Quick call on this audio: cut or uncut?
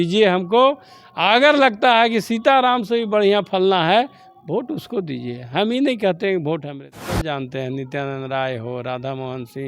cut